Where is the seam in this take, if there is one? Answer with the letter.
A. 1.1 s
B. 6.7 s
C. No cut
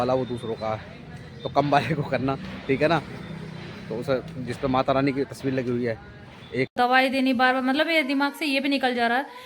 B